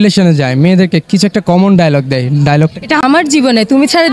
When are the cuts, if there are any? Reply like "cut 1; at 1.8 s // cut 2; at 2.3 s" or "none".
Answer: cut 1; at 3.0 s